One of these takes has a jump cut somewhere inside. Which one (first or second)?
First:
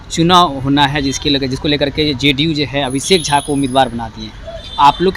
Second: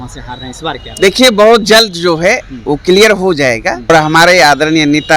second